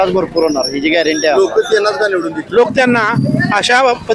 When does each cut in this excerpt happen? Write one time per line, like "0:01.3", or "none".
0:02.4